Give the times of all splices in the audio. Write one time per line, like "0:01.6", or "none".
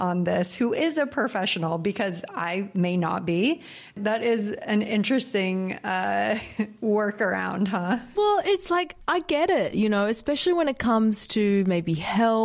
0:03.9
0:08.1